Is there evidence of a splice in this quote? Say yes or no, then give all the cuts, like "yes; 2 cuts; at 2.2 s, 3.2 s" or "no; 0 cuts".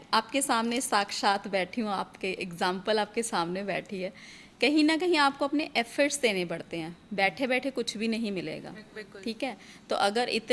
no; 0 cuts